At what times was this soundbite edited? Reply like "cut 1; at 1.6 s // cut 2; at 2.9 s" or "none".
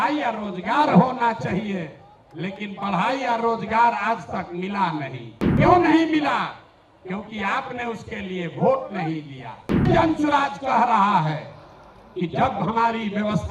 cut 1; at 5.5 s // cut 2; at 9.9 s